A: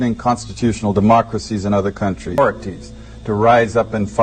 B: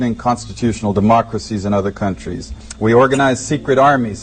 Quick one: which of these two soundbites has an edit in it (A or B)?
A